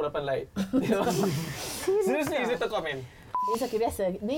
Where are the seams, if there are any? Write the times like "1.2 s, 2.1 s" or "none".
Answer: 3.5 s